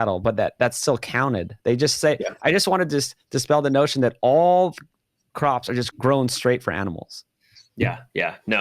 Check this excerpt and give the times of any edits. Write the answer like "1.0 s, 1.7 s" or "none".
5.9 s